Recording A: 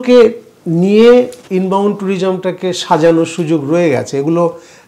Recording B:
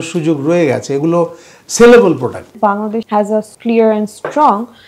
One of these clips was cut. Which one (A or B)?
B